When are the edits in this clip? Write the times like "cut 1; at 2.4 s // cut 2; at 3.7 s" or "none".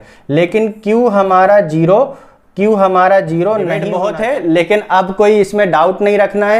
cut 1; at 3.9 s

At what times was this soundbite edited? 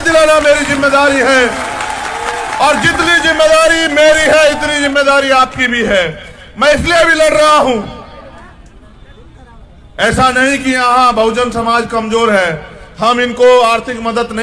none

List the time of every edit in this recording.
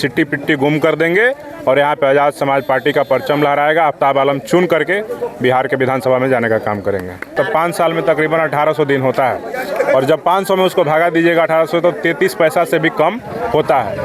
cut 1; at 7.3 s

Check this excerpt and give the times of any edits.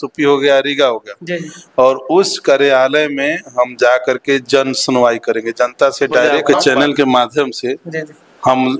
cut 1; at 6.4 s

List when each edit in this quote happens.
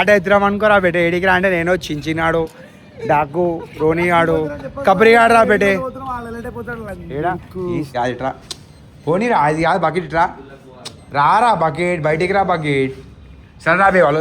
cut 1; at 7.9 s

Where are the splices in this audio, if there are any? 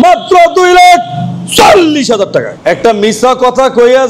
cut 1; at 2.5 s

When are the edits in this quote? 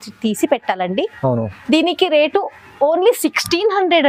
none

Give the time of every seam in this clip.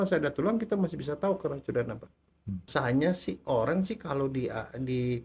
cut 1; at 2.7 s

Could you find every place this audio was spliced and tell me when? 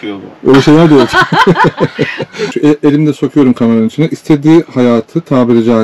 cut 1; at 2.5 s

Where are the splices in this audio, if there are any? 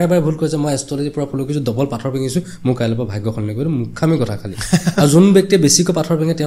none

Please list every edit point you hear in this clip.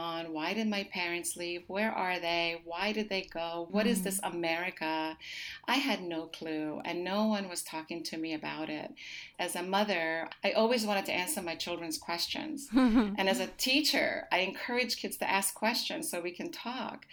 cut 1; at 3.7 s // cut 2; at 9.3 s // cut 3; at 10.3 s

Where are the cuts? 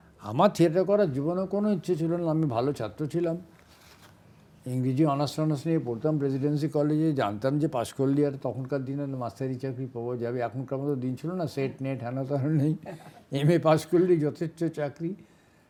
none

